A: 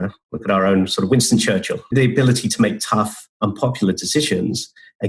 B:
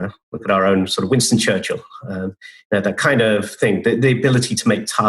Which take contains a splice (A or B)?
A